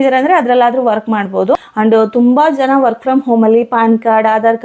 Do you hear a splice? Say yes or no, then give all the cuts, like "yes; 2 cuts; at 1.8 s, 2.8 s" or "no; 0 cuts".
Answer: yes; 1 cut; at 1.7 s